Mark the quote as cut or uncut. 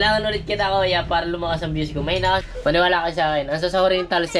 cut